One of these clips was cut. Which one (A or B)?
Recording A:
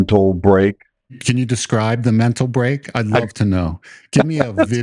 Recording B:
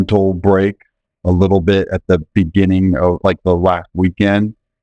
A